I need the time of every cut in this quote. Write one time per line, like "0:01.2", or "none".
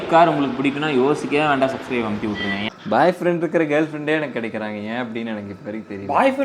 0:02.6